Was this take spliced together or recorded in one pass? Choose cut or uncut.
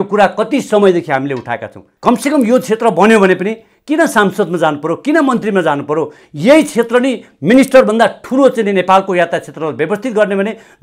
cut